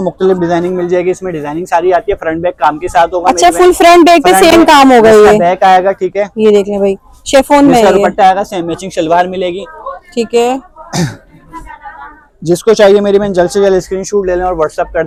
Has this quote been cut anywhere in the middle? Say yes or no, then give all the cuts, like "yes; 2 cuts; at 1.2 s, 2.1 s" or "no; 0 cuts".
no; 0 cuts